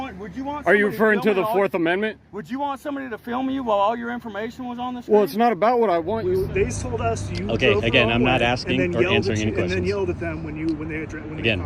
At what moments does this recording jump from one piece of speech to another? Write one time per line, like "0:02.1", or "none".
0:06.2